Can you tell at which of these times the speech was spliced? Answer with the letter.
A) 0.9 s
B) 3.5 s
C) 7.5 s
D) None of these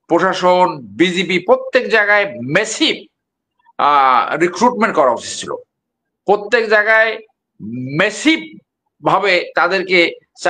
D